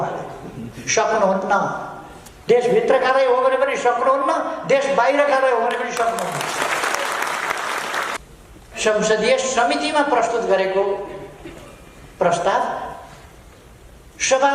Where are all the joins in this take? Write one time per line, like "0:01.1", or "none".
0:08.2